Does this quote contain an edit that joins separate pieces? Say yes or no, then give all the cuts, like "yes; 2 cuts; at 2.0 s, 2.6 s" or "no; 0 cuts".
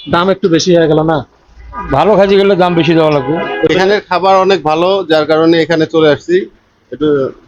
yes; 1 cut; at 3.7 s